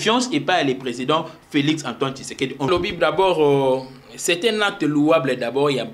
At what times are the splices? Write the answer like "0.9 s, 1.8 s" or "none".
2.7 s